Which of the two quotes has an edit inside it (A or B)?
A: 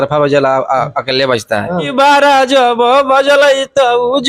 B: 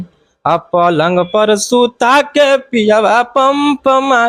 A